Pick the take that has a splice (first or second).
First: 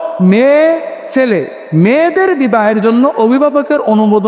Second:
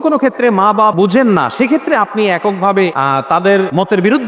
second